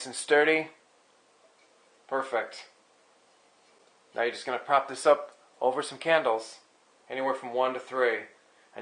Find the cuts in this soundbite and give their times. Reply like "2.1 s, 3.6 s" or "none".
none